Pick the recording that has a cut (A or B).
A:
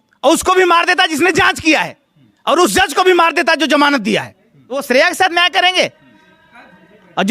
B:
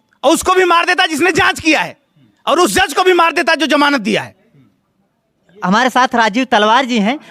A